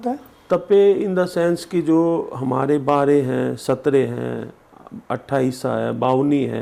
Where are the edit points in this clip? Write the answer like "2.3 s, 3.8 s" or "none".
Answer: none